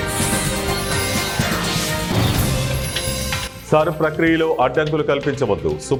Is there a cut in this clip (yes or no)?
no